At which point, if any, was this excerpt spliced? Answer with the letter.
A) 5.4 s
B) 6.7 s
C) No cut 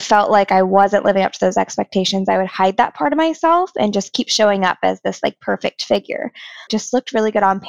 B